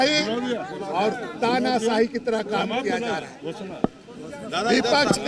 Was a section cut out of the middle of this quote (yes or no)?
no